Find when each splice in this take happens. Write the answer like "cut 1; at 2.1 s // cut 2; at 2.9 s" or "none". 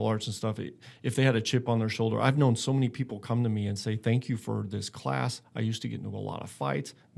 none